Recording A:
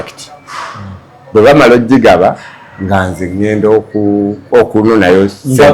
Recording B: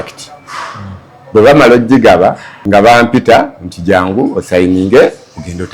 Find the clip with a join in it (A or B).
B